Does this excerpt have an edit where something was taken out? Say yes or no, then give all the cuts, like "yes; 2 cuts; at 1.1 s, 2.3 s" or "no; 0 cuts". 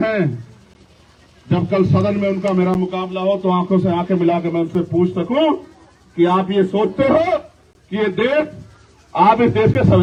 no; 0 cuts